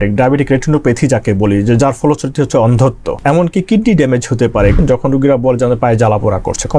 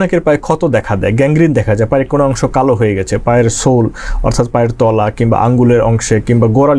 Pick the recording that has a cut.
first; 2 cuts; at 3.1 s, 4.8 s

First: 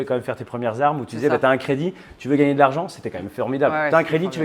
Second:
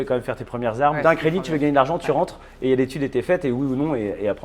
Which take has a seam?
second; 1 cut; at 1.0 s

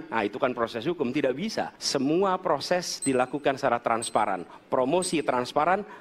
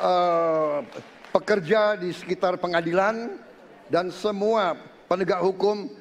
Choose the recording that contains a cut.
first; 1 cut; at 1.8 s

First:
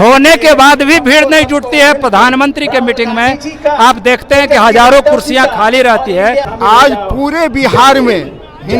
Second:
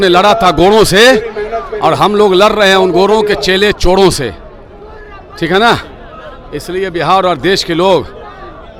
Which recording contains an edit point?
first; 1 cut; at 6.5 s

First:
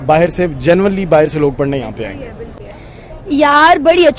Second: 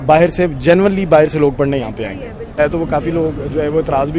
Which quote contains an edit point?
second; 1 cut; at 2.6 s

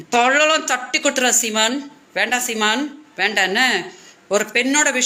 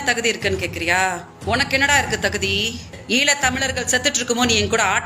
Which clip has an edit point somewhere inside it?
second; 2 cuts; at 1.6 s, 2.9 s

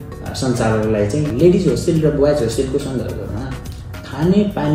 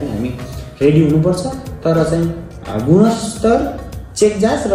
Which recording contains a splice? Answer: first; 1 cut; at 1.3 s

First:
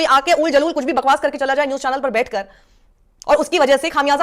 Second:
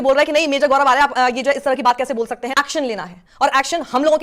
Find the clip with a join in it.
second; 1 cut; at 2.5 s

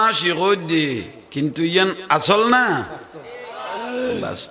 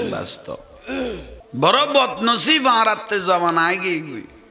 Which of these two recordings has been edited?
second; 1 cut; at 1.4 s

